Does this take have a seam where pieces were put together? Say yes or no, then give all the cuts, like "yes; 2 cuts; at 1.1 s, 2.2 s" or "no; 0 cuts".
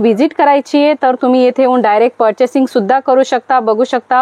no; 0 cuts